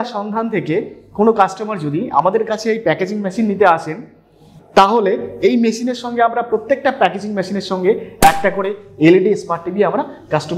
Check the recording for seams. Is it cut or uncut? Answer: uncut